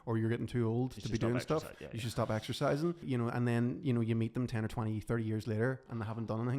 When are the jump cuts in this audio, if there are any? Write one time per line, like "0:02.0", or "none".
0:03.0